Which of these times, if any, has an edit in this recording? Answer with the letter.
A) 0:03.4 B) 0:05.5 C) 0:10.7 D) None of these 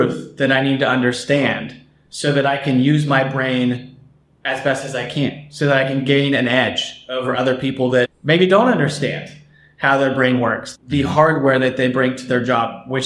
C